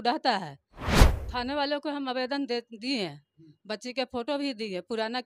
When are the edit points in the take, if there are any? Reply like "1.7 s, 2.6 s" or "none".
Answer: 0.9 s